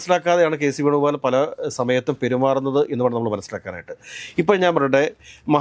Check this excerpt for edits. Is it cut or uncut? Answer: uncut